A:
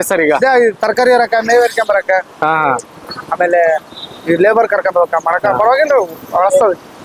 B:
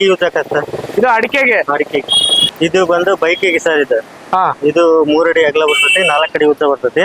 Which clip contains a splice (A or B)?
B